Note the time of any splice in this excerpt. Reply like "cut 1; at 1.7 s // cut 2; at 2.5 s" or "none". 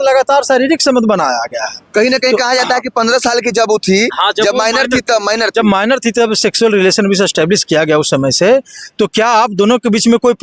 none